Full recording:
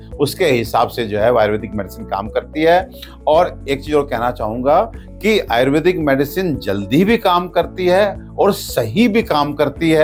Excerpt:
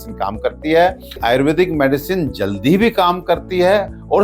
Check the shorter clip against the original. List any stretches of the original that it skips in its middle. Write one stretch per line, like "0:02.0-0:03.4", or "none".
0:03.1-0:05.5